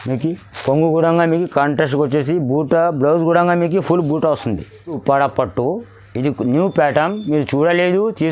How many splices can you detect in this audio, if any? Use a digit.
1